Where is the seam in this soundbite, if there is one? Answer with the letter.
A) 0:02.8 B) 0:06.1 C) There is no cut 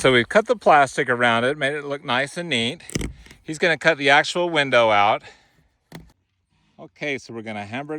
B